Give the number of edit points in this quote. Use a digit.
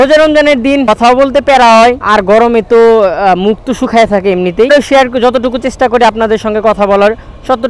0